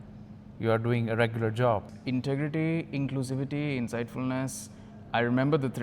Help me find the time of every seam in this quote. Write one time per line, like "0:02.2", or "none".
0:01.9